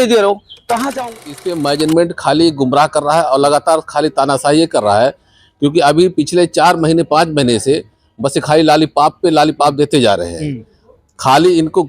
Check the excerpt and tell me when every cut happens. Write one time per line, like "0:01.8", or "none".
0:01.1